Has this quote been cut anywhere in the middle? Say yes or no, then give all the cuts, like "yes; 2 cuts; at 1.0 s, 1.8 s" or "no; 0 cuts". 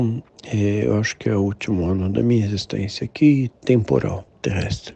no; 0 cuts